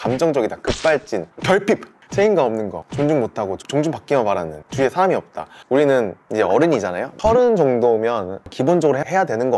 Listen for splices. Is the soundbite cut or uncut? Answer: cut